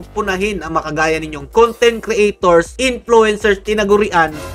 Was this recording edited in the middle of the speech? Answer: no; 0 cuts

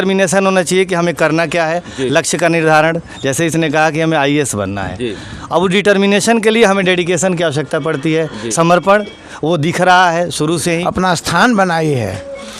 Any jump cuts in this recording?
yes; 1 cut; at 10.8 s

